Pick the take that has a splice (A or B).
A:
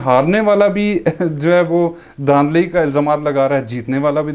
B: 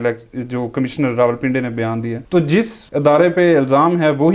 B